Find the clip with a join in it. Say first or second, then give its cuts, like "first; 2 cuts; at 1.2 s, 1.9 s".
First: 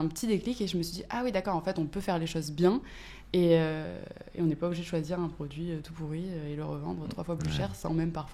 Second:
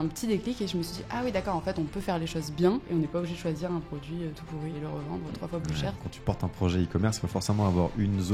second; 3 cuts; at 2.8 s, 4.7 s, 6.0 s